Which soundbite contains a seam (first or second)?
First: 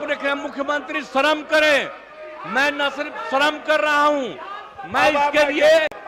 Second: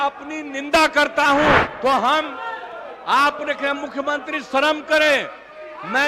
second